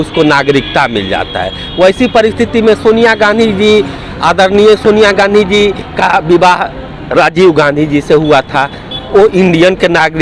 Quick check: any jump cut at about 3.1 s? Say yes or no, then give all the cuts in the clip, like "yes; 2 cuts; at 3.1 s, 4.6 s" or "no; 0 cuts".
no; 0 cuts